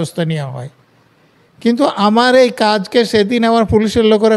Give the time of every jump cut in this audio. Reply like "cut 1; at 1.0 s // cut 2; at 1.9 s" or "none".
none